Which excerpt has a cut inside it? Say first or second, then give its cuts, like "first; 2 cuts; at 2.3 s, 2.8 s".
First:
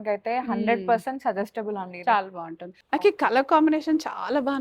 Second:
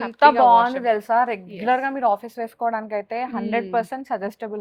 first; 1 cut; at 2.7 s